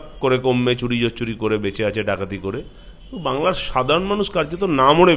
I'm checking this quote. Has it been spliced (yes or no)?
no